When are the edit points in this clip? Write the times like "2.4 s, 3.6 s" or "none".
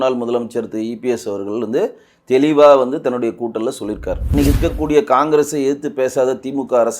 4.2 s